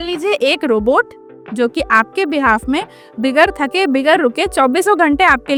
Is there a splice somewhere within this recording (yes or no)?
no